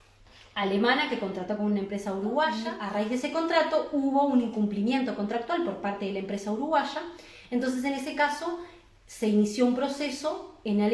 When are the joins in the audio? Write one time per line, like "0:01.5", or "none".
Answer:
0:02.6